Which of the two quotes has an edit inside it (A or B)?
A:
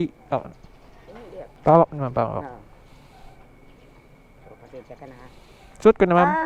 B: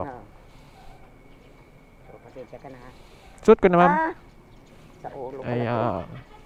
A